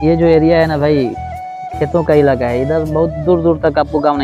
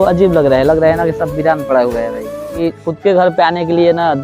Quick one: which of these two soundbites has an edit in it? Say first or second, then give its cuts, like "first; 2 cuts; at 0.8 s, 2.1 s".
second; 1 cut; at 2.6 s